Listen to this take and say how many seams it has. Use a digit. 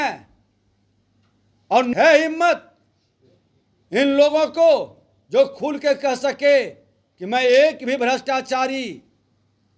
1